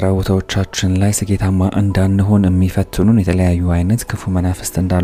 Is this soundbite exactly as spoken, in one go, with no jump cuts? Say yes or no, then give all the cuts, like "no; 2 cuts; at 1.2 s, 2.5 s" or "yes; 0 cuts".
yes; 0 cuts